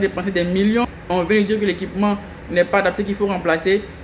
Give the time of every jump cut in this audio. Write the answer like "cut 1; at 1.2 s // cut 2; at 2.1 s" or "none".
cut 1; at 1.0 s